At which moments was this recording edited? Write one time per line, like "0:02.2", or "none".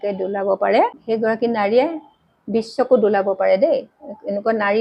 0:01.0